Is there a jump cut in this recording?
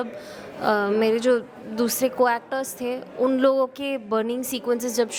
no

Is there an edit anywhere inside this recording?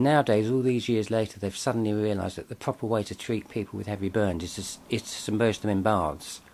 no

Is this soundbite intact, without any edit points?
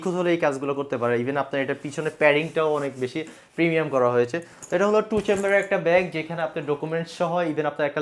yes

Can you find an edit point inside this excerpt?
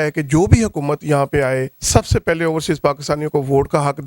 yes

